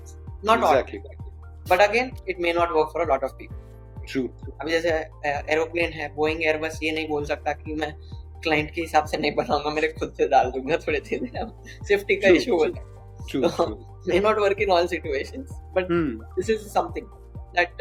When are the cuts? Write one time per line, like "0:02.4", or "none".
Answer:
none